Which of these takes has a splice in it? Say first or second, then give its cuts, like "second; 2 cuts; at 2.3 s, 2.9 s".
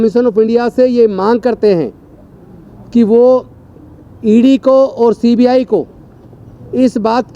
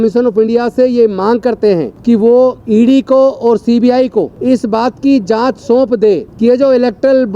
second; 4 cuts; at 1.9 s, 2.6 s, 4.3 s, 6.3 s